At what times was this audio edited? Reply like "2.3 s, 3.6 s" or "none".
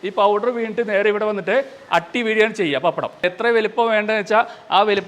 3.2 s